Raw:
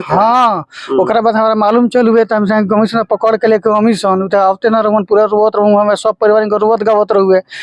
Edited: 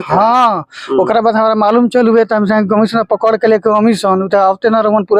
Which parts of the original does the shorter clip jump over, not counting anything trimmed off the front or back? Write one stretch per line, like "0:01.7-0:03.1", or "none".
none